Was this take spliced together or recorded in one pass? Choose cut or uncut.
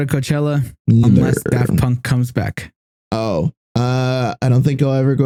uncut